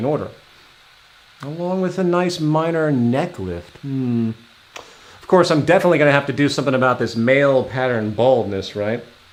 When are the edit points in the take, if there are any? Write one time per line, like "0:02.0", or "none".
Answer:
none